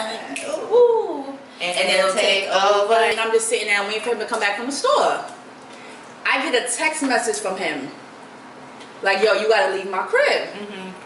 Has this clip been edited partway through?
yes; 1 cut; at 3.1 s

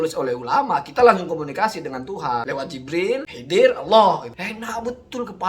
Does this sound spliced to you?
yes; 2 cuts; at 2.8 s, 4.3 s

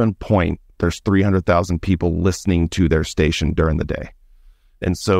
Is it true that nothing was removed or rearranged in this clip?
yes; 0 cuts

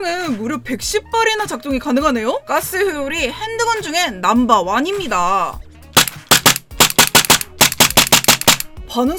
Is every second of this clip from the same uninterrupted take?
yes; 0 cuts

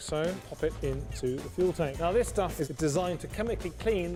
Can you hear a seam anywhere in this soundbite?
no; 0 cuts

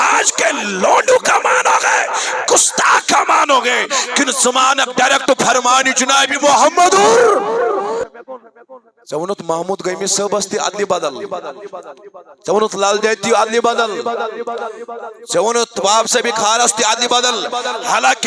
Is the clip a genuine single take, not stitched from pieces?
no; 1 cut; at 8.0 s

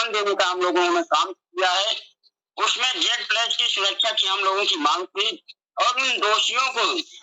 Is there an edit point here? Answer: no; 0 cuts

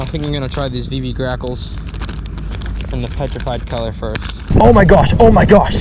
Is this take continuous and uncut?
no; 1 cut; at 4.5 s

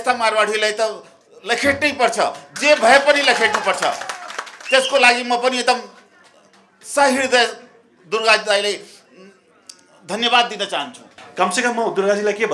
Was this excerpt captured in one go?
no; 1 cut; at 11.2 s

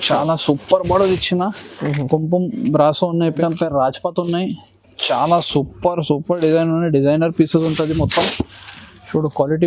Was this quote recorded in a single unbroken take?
no; 1 cut; at 3.4 s

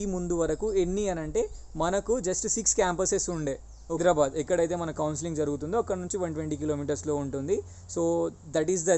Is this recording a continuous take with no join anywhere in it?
no; 1 cut; at 4.0 s

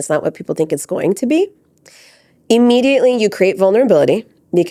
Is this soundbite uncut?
yes; 0 cuts

